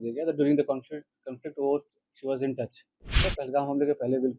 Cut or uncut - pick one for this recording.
cut